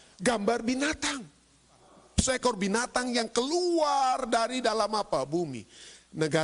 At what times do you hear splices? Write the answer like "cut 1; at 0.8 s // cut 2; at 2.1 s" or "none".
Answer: cut 1; at 1.9 s